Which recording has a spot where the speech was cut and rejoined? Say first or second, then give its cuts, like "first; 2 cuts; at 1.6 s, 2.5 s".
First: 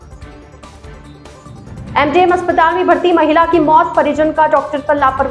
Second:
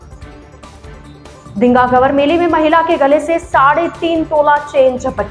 second; 1 cut; at 0.9 s